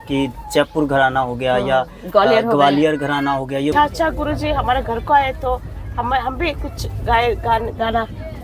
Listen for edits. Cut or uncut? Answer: cut